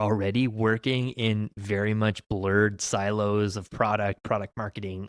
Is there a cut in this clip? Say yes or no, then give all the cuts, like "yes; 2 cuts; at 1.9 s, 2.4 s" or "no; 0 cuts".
no; 0 cuts